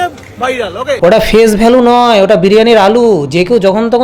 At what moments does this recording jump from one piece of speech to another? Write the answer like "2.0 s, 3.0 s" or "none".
1.0 s